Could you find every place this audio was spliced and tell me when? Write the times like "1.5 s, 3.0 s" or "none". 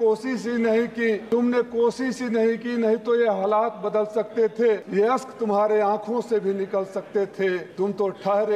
1.2 s, 4.9 s, 7.7 s

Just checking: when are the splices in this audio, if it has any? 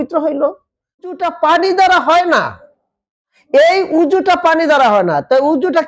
1.1 s

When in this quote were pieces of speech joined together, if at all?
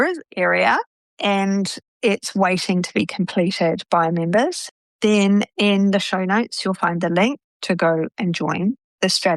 4.7 s, 7.5 s

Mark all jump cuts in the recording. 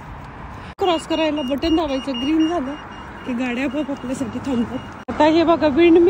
0.7 s, 4.9 s

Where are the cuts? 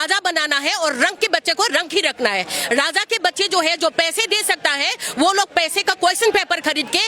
none

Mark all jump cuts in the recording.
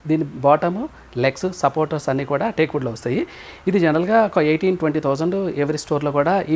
none

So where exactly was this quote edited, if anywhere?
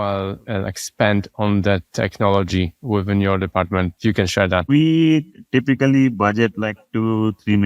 2.8 s, 4.3 s

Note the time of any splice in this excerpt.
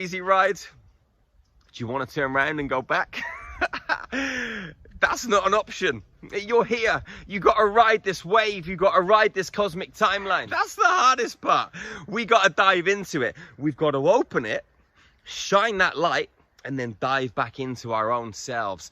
10.5 s

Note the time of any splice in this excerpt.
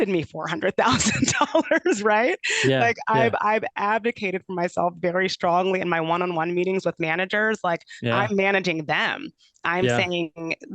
none

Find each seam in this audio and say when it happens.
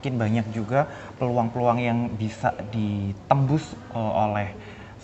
none

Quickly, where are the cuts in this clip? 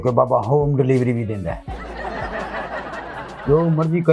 1.8 s, 3.1 s

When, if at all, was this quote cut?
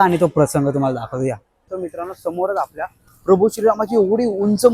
1.7 s

